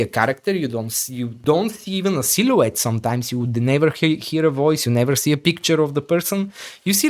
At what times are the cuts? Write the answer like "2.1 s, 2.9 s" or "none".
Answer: 1.3 s